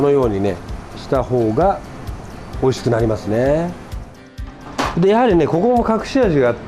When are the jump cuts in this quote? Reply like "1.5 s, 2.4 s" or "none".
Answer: 4.1 s